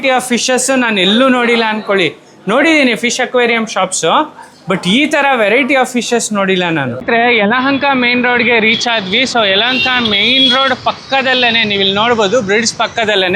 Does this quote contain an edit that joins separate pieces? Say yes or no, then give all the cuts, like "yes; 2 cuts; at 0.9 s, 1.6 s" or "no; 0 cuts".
yes; 1 cut; at 6.8 s